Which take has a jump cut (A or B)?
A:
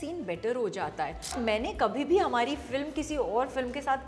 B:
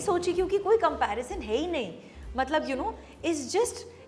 A